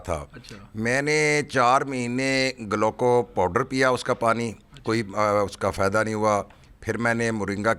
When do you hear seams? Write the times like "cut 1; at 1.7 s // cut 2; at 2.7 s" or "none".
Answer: none

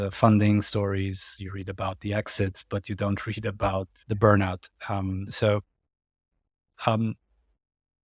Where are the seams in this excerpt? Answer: cut 1; at 3.9 s // cut 2; at 5.3 s

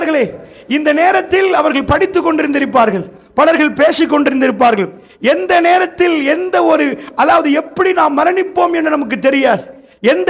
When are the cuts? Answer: none

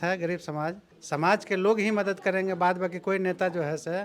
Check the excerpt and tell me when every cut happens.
cut 1; at 0.9 s

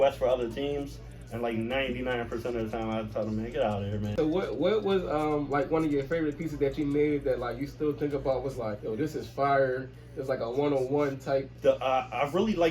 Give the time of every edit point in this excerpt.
cut 1; at 4.1 s // cut 2; at 8.8 s // cut 3; at 11.5 s

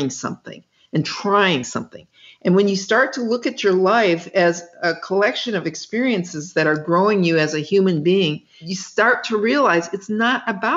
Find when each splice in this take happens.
cut 1; at 8.5 s

